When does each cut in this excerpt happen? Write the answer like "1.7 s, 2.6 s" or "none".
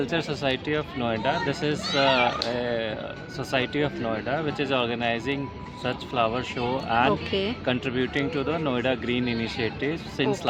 none

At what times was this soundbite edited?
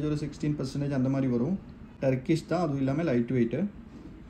none

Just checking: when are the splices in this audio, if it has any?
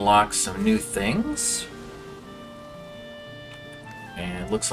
none

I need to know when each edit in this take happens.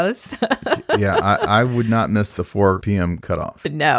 3.0 s

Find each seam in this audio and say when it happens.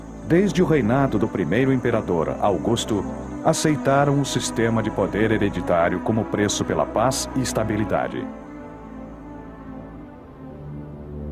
3.1 s

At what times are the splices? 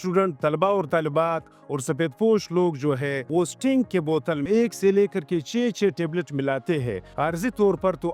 3.2 s, 4.4 s, 7.1 s

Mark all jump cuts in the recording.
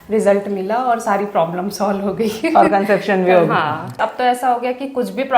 4.0 s

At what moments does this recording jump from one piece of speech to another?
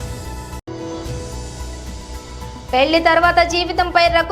2.0 s

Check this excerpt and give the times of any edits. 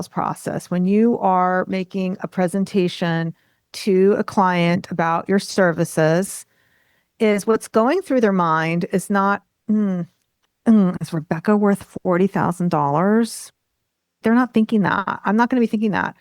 10.3 s

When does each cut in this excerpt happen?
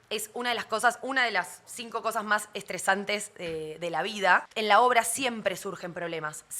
4.5 s

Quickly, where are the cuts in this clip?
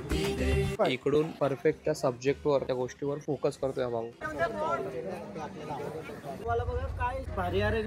4.2 s, 6.4 s

